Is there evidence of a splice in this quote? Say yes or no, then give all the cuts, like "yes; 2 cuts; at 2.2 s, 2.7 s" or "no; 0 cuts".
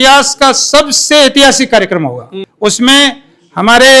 no; 0 cuts